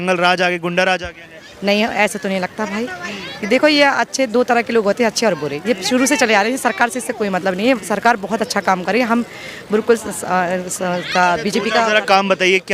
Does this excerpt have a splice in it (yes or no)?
no